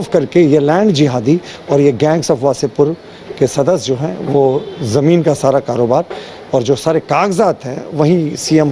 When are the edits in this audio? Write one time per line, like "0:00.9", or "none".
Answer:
none